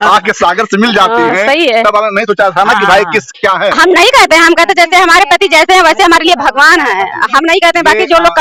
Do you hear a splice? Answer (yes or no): no